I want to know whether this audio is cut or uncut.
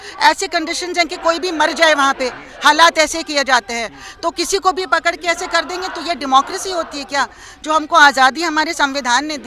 uncut